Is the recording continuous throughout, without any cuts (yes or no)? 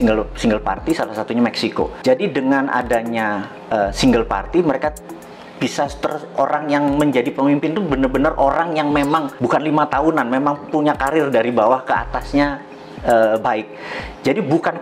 yes